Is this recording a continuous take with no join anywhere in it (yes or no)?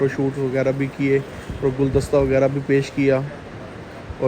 yes